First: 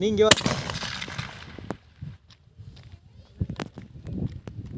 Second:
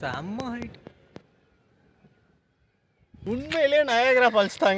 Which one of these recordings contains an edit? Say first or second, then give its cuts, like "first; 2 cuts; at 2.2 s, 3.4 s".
second; 1 cut; at 3.2 s